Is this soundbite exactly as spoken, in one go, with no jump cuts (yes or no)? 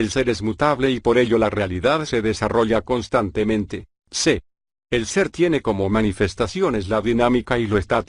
no